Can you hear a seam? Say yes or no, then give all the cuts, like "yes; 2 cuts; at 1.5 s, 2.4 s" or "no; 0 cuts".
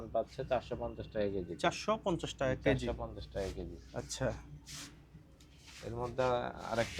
no; 0 cuts